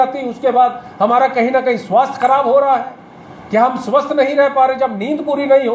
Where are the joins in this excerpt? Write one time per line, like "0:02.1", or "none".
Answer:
none